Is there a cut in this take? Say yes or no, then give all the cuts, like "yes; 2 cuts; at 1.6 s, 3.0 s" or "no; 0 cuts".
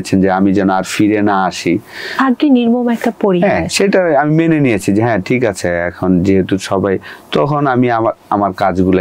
no; 0 cuts